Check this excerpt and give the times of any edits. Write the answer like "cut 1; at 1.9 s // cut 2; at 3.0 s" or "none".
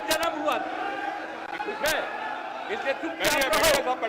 none